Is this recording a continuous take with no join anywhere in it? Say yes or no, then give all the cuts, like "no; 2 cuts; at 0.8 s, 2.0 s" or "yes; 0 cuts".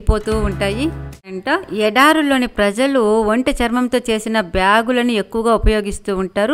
no; 1 cut; at 1.3 s